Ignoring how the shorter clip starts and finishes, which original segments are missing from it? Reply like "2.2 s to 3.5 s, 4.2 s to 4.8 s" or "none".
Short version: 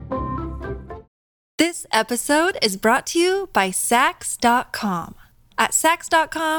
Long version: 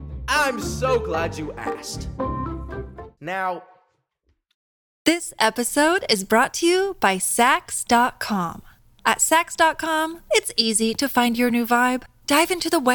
3.1 s to 4.4 s

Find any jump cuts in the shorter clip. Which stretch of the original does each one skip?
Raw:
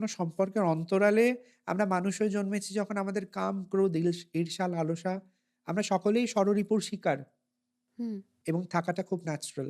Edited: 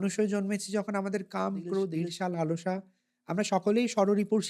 4.0 s to 4.3 s

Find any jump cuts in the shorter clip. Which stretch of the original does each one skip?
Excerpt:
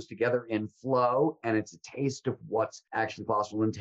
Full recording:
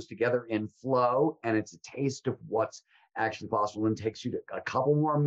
2.8 s to 3.0 s

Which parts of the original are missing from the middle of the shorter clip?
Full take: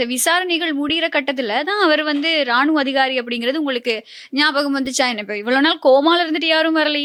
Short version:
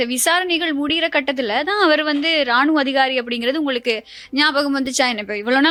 none

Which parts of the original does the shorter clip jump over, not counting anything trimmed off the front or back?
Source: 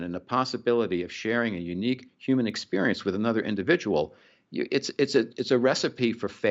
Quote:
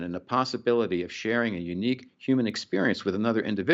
none

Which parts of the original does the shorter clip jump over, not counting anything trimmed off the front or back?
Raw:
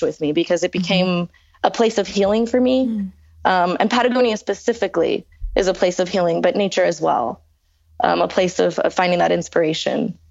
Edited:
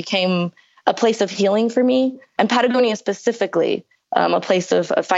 3.1 s to 3.7 s, 5.3 s to 7.8 s

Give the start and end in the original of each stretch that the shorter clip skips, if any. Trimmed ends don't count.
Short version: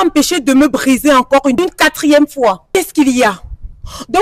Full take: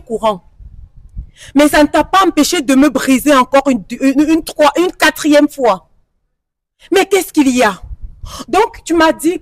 3.8 s to 4.8 s, 6.0 s to 7.1 s

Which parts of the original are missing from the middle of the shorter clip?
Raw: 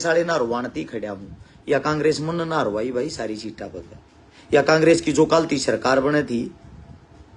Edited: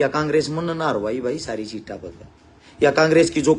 none

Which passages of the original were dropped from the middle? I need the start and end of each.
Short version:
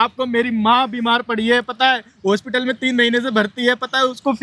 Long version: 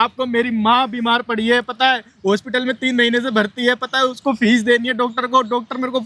none

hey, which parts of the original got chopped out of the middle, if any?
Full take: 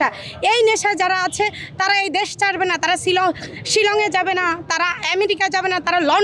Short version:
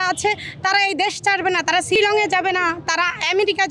3.1 s to 3.8 s

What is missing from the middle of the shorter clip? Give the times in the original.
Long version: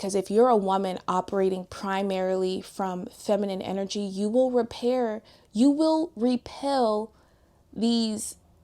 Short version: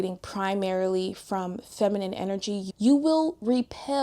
4.1 s to 5.3 s

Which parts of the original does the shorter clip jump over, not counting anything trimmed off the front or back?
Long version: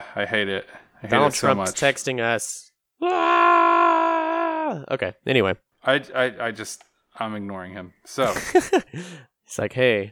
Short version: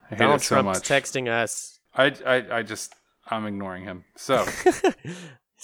2.7 s to 5.7 s

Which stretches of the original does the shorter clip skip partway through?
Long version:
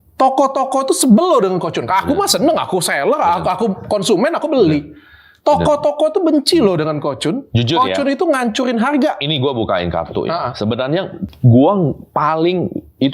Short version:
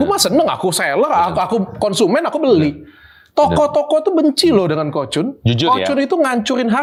none

